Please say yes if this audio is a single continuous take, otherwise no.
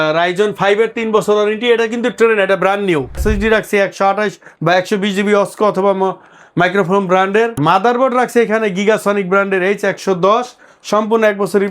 no